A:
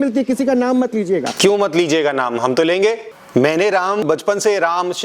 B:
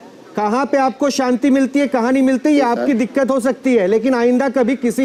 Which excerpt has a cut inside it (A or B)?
A